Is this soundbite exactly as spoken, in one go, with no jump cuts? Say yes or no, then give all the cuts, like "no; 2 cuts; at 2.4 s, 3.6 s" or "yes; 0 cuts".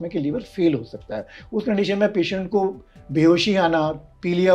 yes; 0 cuts